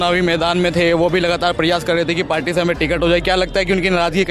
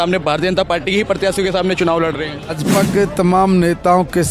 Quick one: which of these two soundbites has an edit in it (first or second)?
second